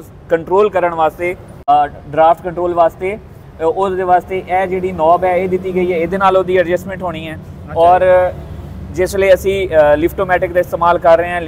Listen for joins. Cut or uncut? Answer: cut